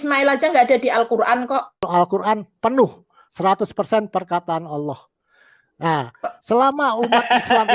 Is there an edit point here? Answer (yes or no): yes